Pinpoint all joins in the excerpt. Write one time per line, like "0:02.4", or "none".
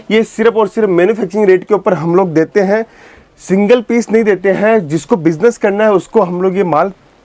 none